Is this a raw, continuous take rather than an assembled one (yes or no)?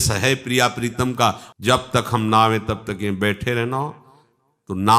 no